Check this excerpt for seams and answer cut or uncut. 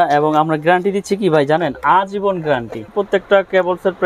cut